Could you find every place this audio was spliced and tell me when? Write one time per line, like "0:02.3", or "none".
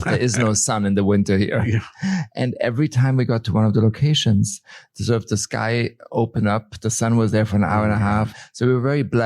0:08.3